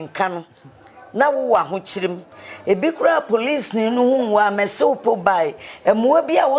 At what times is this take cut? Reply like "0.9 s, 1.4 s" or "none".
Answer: none